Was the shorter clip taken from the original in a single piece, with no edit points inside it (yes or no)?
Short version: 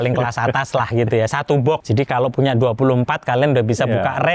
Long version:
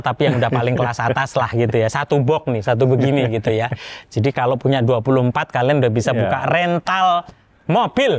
no